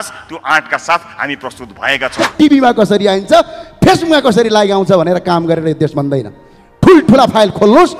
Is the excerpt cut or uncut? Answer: cut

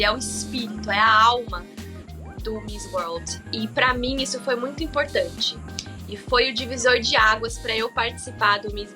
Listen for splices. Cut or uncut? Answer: uncut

